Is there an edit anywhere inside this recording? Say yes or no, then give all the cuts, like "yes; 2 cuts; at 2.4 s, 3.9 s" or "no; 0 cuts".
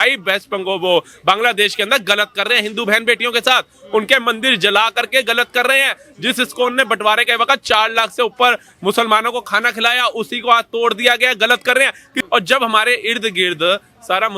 yes; 1 cut; at 12.1 s